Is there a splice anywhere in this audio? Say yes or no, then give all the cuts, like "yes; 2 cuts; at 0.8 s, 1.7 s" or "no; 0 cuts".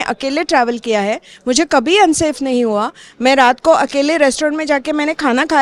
no; 0 cuts